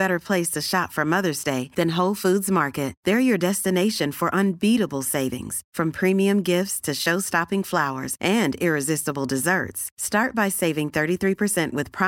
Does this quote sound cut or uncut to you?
uncut